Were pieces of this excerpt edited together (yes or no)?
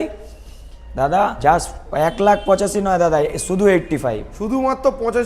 yes